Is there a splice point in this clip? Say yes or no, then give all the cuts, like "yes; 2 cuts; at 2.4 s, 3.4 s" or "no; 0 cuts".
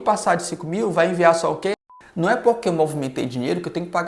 yes; 1 cut; at 1.8 s